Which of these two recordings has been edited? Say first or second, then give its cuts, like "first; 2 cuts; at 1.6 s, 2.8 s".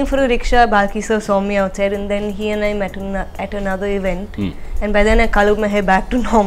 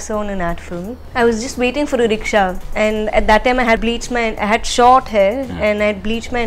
second; 3 cuts; at 1.0 s, 2.6 s, 3.8 s